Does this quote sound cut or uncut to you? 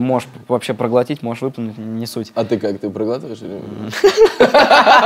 uncut